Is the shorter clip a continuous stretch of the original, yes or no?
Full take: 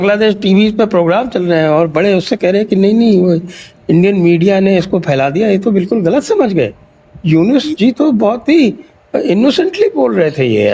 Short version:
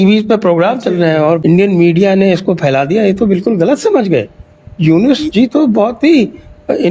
no